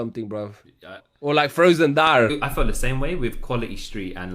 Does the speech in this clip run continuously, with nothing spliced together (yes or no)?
no